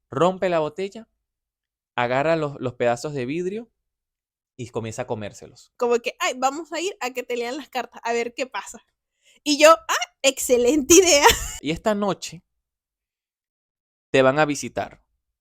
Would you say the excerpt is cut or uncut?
cut